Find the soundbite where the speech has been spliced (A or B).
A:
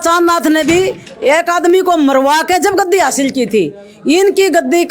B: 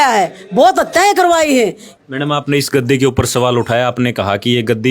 B